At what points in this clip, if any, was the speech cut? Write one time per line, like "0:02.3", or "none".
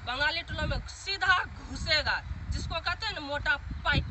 none